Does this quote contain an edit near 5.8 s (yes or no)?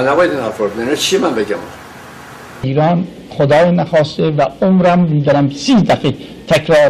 no